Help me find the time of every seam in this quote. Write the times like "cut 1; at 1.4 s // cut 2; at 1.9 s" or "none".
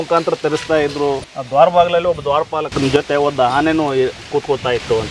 cut 1; at 1.3 s